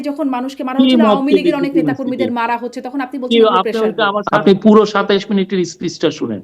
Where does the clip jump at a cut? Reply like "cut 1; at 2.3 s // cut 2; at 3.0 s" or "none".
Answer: cut 1; at 4.3 s